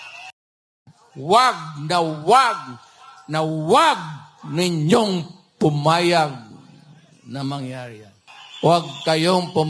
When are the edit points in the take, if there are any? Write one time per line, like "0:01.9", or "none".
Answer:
none